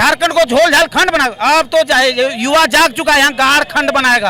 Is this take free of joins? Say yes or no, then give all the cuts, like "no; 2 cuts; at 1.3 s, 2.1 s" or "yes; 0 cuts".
yes; 0 cuts